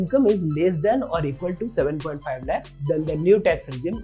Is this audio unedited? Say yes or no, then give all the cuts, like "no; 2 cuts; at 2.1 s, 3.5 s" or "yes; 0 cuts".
yes; 0 cuts